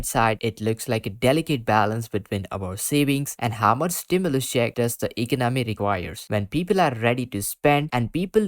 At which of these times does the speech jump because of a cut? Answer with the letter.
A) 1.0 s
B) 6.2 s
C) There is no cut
B